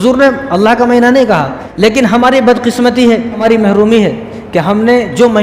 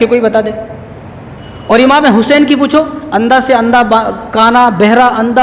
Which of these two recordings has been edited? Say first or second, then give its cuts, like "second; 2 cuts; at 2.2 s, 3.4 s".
first; 2 cuts; at 1.6 s, 3.4 s